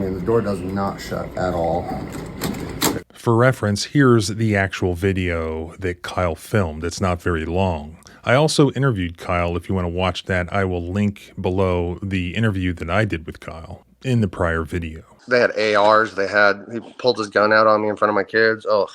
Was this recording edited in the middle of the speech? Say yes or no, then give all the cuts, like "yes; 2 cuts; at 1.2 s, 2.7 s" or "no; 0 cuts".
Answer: no; 0 cuts